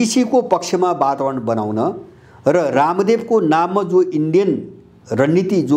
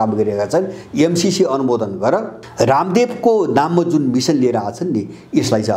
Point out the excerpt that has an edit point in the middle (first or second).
second